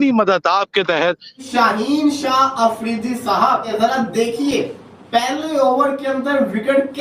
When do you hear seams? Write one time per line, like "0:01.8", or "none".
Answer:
0:01.3
0:03.7